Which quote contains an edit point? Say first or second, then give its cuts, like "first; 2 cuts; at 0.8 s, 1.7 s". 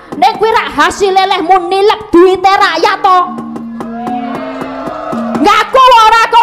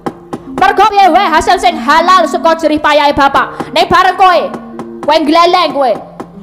second; 1 cut; at 0.9 s